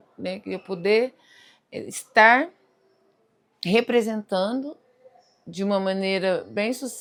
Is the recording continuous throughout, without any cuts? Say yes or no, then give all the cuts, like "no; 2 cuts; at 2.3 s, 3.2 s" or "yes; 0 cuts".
yes; 0 cuts